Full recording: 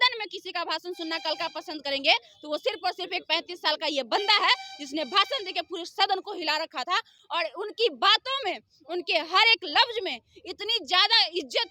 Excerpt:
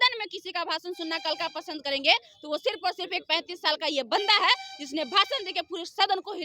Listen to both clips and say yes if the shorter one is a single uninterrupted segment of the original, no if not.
yes